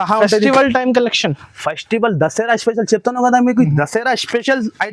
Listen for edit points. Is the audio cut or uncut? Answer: uncut